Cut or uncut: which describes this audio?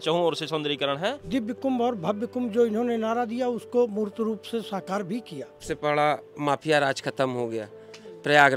cut